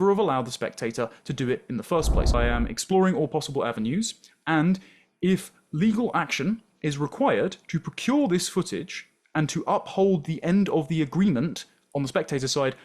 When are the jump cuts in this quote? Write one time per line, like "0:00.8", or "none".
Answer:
0:02.4